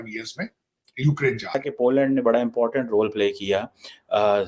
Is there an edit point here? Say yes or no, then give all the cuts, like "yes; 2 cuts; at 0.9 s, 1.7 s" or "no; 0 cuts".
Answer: yes; 1 cut; at 1.6 s